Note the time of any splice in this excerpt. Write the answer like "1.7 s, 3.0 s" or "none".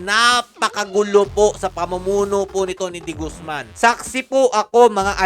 3.6 s